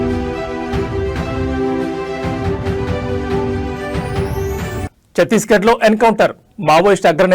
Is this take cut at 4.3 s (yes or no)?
yes